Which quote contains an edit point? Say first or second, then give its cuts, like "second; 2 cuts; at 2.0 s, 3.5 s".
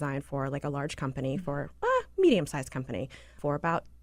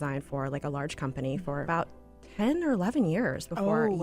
second; 1 cut; at 1.6 s